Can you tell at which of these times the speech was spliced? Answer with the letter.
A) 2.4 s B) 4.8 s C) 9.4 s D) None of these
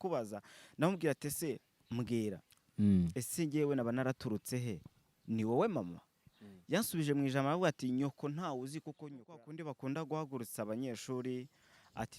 C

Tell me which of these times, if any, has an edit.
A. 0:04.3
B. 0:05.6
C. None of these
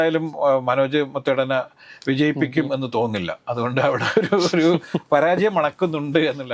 C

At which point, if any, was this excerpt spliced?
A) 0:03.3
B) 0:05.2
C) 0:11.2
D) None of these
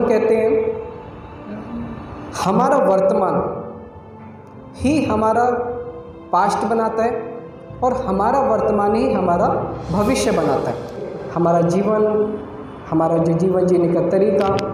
C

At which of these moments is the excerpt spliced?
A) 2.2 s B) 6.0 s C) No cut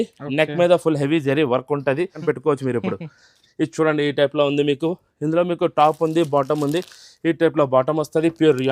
A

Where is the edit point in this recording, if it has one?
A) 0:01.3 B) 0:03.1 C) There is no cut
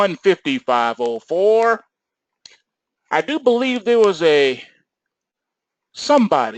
B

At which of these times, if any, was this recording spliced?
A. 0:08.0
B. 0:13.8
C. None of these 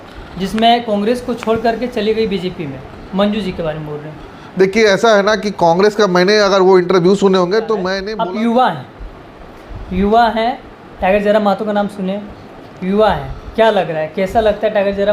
A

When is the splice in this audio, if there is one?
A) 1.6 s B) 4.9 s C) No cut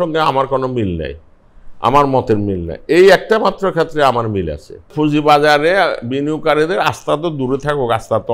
B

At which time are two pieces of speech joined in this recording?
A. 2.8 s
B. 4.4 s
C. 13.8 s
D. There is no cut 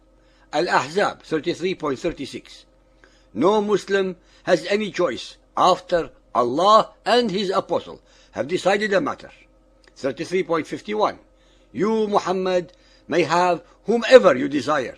B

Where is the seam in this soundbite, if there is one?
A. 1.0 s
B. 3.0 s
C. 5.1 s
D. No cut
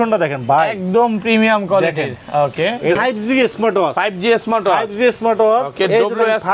B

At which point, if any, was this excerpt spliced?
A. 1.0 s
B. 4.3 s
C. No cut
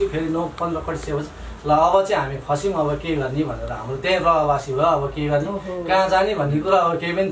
C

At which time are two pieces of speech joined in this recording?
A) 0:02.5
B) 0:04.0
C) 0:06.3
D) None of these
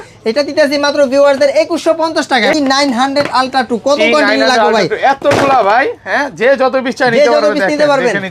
A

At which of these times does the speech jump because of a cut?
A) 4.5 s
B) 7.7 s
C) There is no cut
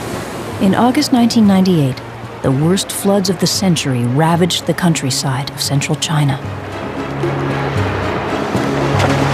B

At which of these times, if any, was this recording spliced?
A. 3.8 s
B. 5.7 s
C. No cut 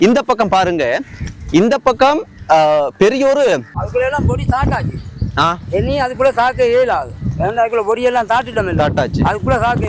A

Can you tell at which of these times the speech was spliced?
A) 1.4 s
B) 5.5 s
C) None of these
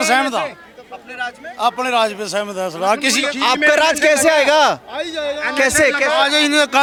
C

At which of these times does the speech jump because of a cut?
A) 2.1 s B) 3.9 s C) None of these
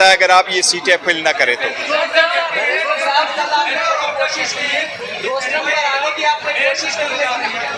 A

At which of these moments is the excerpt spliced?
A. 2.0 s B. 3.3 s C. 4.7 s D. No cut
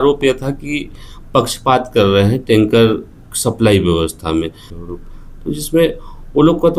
C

